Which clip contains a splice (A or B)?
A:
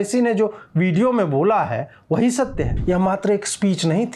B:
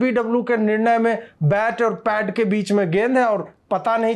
A